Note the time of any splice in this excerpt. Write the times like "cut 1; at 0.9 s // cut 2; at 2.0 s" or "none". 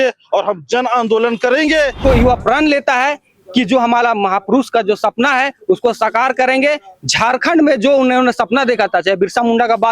cut 1; at 2.0 s